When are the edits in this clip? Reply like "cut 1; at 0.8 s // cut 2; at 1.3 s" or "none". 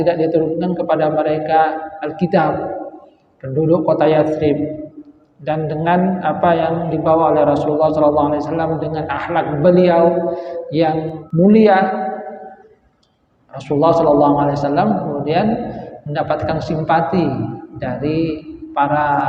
cut 1; at 11.2 s

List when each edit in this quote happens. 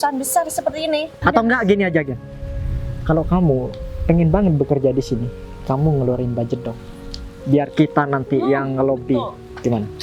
cut 1; at 1.1 s

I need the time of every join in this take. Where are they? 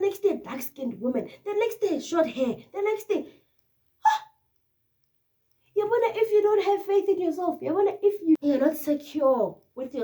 cut 1; at 8.4 s

